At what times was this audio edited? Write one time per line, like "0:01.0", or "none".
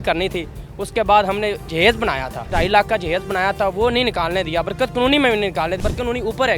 0:02.3
0:05.8